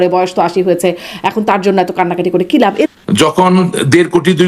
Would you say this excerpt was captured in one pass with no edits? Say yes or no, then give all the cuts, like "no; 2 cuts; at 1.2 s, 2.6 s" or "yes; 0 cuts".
no; 1 cut; at 2.9 s